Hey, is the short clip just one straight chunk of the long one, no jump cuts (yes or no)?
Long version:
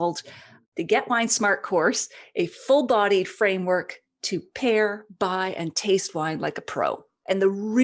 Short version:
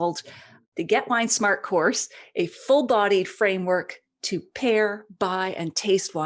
yes